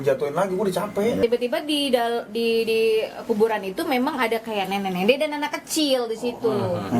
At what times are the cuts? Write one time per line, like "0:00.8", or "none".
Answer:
0:01.2